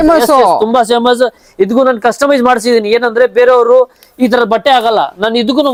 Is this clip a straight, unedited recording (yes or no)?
yes